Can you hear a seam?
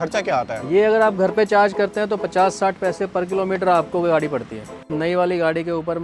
yes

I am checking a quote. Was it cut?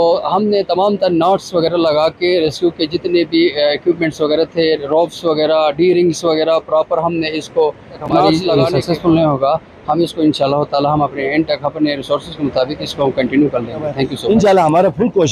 yes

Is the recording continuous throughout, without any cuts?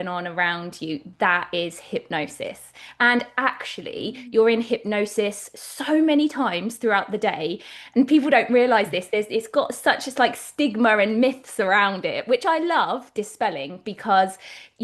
yes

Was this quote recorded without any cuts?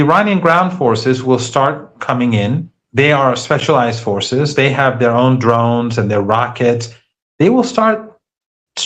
yes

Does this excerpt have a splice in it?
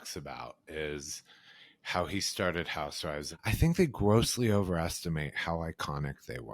yes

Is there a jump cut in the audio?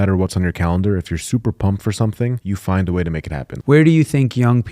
yes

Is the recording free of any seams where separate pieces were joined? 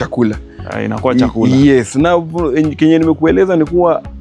yes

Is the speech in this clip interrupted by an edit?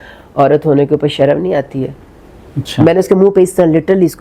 no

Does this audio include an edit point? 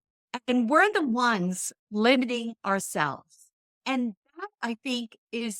yes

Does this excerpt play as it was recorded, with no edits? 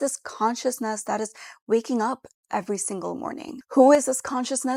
yes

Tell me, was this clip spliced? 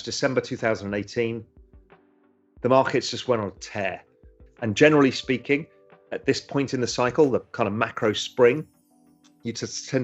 yes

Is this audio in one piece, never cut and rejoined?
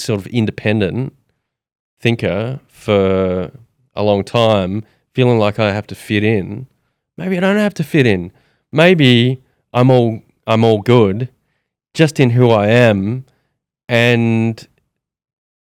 yes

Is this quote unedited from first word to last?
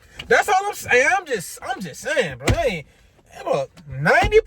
yes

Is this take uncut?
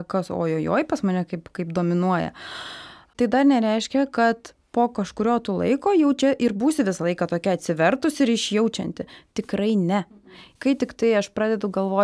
no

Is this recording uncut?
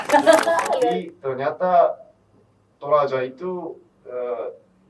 no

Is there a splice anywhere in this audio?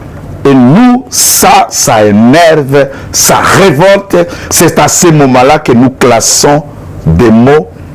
no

